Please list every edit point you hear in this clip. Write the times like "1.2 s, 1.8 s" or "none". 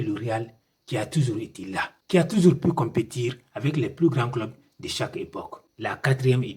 5.6 s